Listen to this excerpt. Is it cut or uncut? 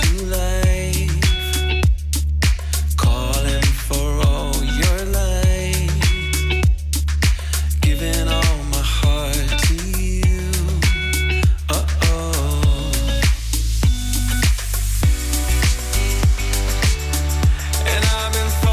uncut